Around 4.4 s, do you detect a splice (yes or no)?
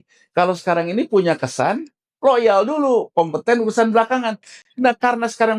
no